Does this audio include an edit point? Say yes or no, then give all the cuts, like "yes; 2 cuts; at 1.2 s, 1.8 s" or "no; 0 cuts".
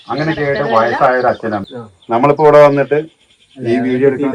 yes; 1 cut; at 1.7 s